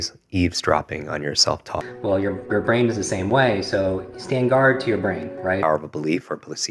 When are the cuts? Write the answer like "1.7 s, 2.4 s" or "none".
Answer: 1.9 s, 5.6 s